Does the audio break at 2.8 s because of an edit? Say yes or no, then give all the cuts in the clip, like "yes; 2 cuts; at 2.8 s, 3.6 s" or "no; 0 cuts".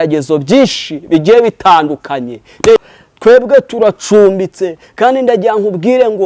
yes; 1 cut; at 2.8 s